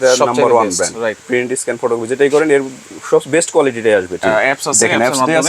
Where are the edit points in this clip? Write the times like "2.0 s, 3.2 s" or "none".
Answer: 1.2 s, 4.2 s